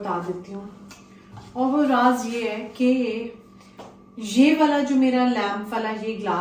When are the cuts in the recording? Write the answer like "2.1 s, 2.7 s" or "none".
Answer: none

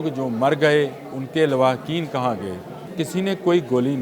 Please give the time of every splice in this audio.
2.8 s

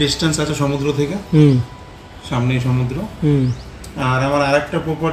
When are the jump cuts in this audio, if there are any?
none

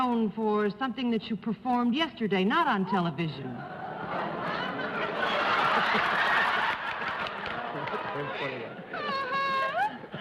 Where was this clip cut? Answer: 5.3 s

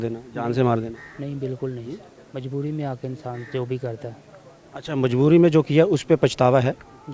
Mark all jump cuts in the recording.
none

